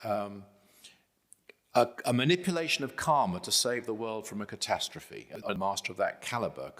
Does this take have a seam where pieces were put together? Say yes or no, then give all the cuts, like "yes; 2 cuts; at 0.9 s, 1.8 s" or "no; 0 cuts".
yes; 1 cut; at 5.5 s